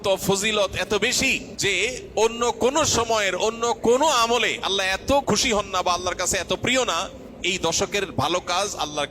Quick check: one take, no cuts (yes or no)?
no